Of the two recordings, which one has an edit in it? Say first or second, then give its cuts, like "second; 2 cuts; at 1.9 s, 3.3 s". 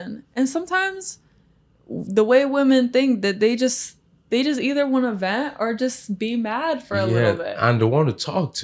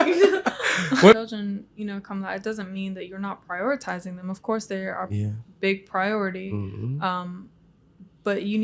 second; 1 cut; at 1.1 s